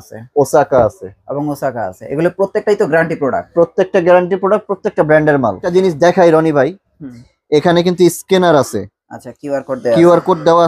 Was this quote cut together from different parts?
yes; 1 cut; at 5.6 s

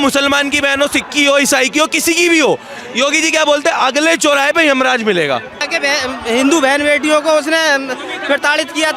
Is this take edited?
yes; 1 cut; at 5.6 s

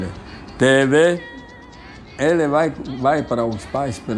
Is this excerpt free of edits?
yes; 0 cuts

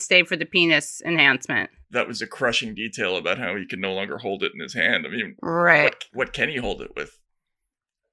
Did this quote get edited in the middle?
yes; 1 cut; at 1.8 s

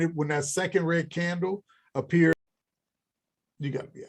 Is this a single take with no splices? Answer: no; 1 cut; at 2.3 s

